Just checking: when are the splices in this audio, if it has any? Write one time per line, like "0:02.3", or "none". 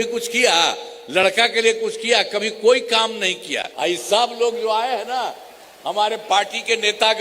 0:03.7

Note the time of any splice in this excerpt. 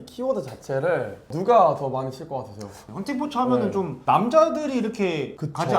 0:01.3
0:02.8
0:03.9

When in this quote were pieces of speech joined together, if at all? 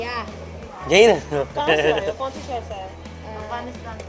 none

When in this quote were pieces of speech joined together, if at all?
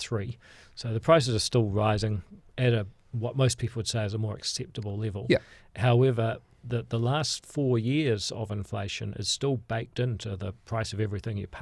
none

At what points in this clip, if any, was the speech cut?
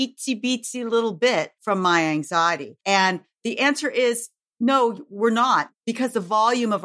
0:01.6
0:02.7
0:05.8

